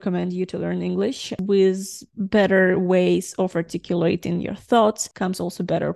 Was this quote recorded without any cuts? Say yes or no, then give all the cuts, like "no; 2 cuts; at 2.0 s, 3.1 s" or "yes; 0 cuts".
no; 2 cuts; at 1.3 s, 5.1 s